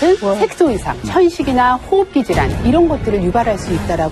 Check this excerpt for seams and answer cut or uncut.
cut